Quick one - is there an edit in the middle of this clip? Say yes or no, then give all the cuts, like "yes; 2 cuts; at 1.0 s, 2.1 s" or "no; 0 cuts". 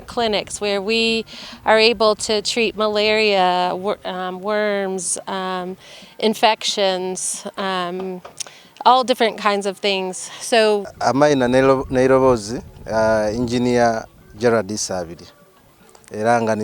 yes; 1 cut; at 10.9 s